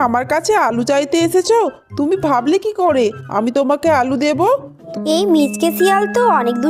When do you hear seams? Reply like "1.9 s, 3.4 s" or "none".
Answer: 4.9 s